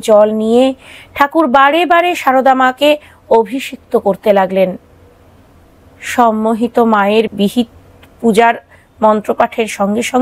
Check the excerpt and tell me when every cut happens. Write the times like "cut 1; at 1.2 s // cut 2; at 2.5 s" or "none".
none